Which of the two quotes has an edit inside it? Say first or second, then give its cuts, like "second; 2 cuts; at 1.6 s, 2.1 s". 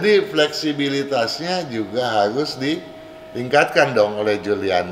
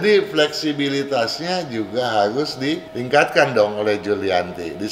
second; 1 cut; at 2.9 s